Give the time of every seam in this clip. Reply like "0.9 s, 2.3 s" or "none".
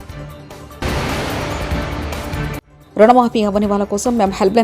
0.8 s, 2.7 s